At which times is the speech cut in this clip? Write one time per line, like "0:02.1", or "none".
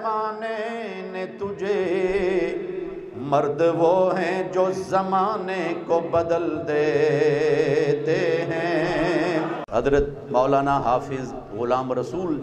0:09.6